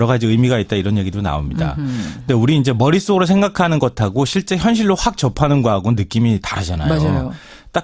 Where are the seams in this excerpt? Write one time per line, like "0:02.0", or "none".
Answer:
none